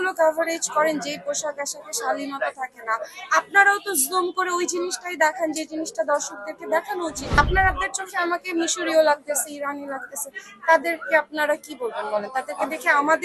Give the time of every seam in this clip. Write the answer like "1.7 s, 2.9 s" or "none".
7.3 s